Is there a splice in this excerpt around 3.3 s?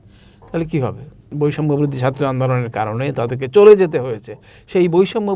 no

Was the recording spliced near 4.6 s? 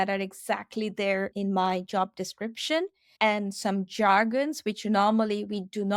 no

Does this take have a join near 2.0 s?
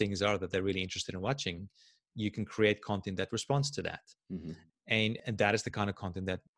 no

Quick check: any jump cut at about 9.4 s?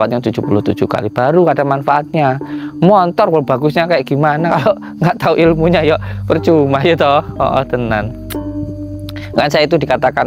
yes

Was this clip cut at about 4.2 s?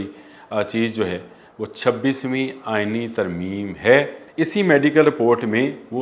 yes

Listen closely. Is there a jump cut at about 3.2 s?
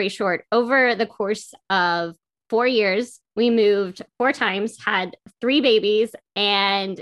yes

